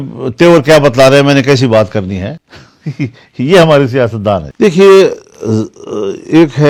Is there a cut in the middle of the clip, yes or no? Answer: no